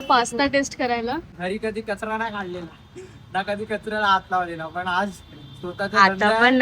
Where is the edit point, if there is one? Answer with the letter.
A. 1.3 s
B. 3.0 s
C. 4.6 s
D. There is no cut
A